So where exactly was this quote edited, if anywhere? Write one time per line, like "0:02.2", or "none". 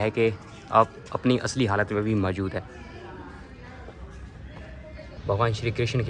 0:05.1